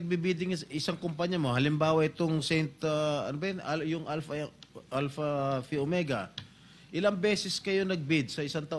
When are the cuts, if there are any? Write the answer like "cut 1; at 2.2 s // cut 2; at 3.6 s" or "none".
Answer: none